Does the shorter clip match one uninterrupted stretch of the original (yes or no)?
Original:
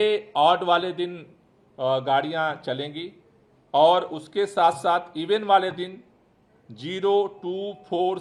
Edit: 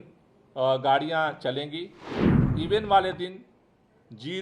no